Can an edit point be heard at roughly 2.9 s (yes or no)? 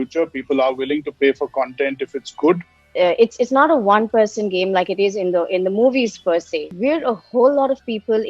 yes